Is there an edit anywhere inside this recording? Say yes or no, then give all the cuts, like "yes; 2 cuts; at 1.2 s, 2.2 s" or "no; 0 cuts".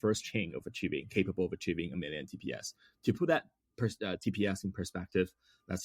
no; 0 cuts